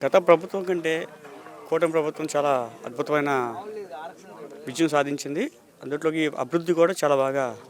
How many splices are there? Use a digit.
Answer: 0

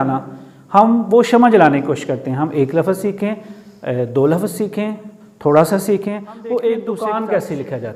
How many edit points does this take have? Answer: 1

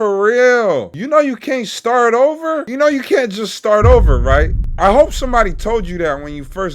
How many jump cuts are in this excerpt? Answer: 3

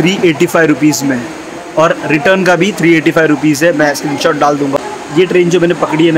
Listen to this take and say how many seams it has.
0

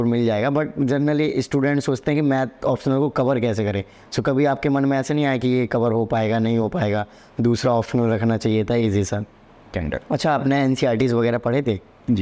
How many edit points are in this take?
1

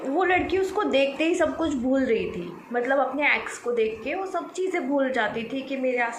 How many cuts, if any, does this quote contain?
0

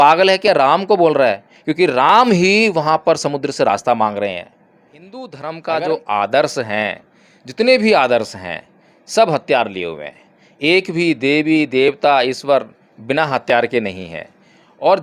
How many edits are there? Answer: 1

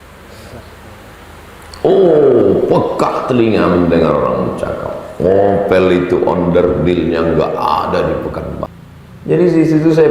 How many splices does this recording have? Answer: 1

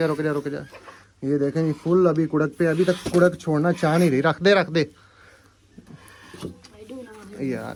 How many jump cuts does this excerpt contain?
0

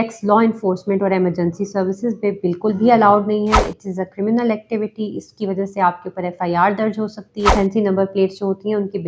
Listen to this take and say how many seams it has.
1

